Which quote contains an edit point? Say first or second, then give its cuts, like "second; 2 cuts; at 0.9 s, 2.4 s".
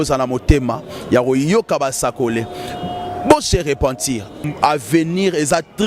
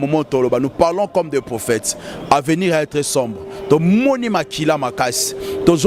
first; 1 cut; at 4.4 s